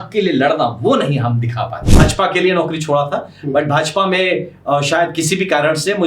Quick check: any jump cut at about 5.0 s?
no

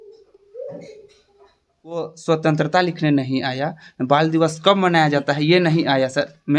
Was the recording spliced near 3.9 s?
no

